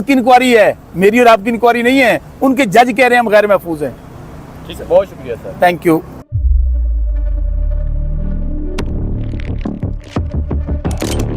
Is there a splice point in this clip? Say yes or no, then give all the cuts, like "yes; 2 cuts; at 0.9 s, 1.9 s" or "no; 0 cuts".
no; 0 cuts